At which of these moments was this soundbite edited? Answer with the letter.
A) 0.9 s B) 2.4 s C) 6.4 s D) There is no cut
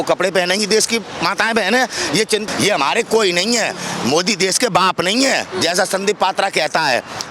B